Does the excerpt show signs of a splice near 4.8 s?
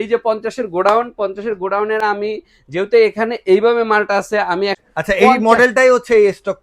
yes; 1 cut; at 4.8 s

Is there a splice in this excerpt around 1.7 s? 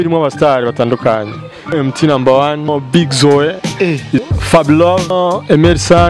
yes; 4 cuts; at 1.7 s, 2.7 s, 4.2 s, 5.1 s

